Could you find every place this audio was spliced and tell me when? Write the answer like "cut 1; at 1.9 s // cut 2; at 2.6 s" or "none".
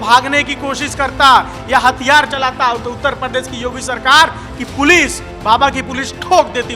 none